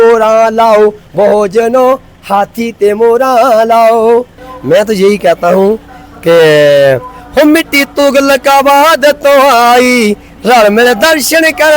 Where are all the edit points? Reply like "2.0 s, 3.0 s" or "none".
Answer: 4.4 s